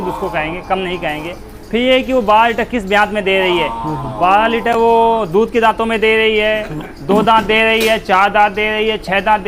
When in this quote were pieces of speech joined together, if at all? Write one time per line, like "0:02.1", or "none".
none